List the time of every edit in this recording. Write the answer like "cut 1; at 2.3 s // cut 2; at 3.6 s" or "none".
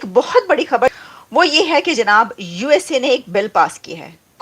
cut 1; at 1.0 s